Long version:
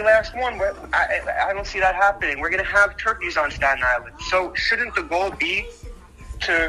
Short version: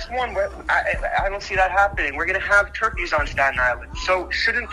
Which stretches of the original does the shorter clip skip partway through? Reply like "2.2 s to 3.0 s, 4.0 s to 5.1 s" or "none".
none